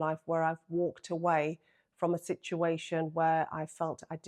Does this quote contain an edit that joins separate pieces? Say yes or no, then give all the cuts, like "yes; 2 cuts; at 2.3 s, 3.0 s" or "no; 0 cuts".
no; 0 cuts